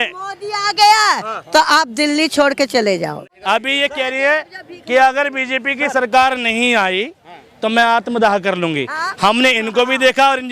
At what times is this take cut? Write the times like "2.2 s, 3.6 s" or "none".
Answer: 3.2 s